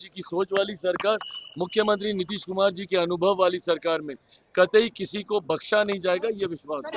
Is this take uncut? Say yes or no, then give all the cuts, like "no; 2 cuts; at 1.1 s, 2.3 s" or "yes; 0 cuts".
yes; 0 cuts